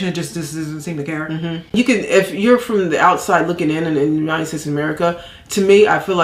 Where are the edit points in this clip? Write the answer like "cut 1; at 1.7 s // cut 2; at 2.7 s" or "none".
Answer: cut 1; at 1.6 s